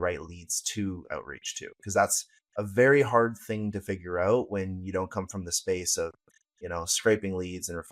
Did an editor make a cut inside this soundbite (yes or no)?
no